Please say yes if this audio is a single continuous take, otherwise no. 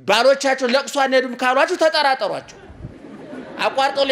yes